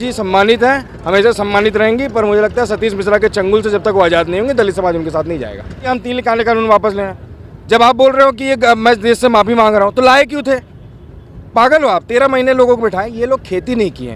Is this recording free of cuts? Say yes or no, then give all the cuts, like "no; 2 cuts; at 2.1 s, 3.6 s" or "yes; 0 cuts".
no; 1 cut; at 5.9 s